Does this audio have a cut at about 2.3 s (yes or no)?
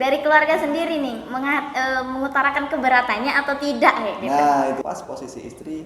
no